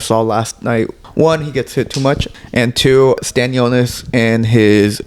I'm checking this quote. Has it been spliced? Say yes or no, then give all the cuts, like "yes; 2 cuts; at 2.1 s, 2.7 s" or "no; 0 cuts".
yes; 3 cuts; at 1.0 s, 2.3 s, 3.2 s